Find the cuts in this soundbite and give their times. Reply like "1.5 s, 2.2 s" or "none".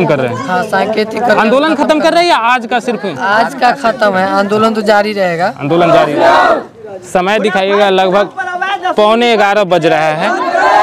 5.9 s